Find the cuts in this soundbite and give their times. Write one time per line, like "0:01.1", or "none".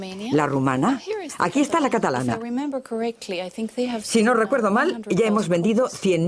0:03.2